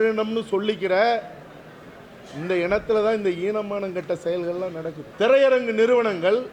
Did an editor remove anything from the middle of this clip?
yes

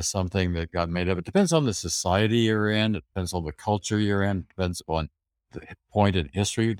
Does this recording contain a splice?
no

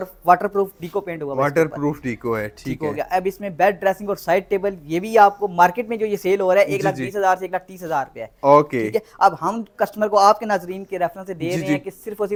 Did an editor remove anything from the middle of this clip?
no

